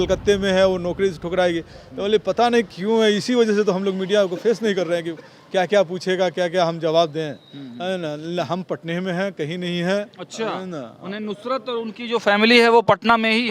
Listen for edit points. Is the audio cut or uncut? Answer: uncut